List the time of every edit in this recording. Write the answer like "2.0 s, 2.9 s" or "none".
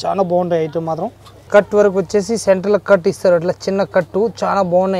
1.4 s